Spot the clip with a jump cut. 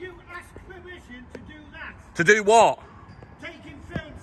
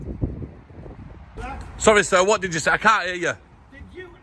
second; 1 cut; at 1.4 s

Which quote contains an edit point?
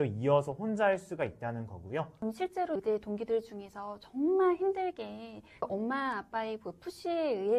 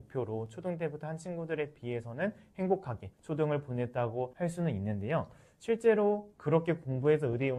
first; 1 cut; at 2.1 s

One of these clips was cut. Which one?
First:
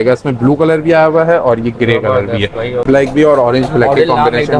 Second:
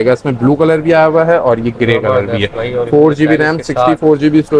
first; 1 cut; at 2.8 s

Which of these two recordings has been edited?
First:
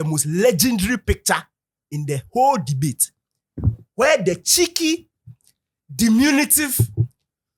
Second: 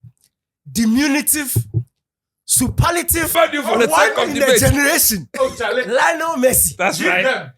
second; 1 cut; at 3.3 s

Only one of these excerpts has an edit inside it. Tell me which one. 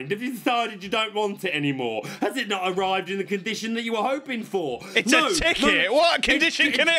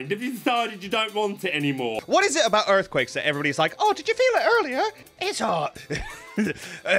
second; 2 cuts; at 2.0 s, 5.0 s

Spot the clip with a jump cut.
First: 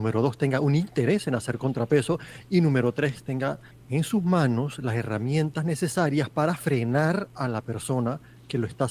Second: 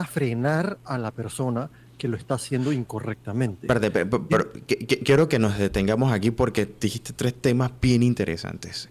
first; 1 cut; at 3.7 s

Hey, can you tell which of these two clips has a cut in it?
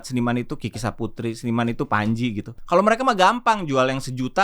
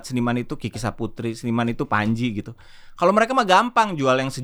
first; 1 cut; at 2.5 s

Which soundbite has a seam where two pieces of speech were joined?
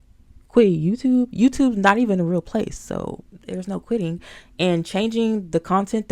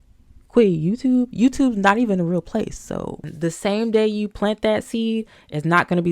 second; 1 cut; at 3.3 s

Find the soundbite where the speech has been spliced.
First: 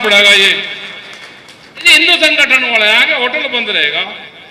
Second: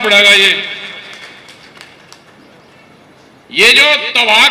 first; 1 cut; at 1.9 s

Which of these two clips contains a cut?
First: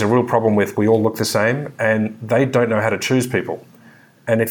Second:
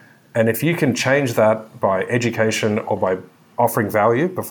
second; 2 cuts; at 1.7 s, 3.7 s

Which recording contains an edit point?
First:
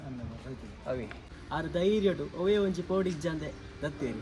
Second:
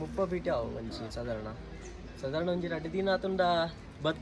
first; 1 cut; at 1.3 s

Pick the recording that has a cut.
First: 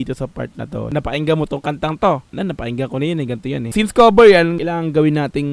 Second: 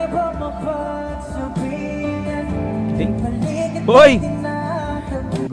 first; 4 cuts; at 0.9 s, 2.3 s, 3.7 s, 4.6 s

